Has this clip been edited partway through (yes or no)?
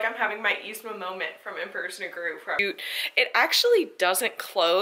yes